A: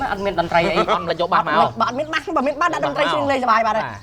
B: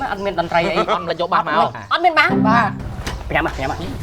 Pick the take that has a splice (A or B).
B